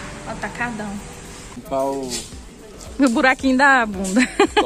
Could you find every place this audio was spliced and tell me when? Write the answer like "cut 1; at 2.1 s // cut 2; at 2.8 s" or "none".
cut 1; at 1.6 s